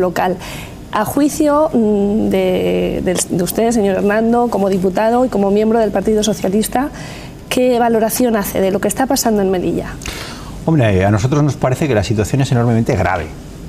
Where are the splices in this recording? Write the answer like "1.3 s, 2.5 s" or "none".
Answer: 10.7 s